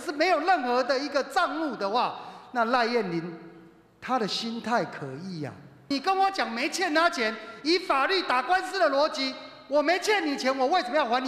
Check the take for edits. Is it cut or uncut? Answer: cut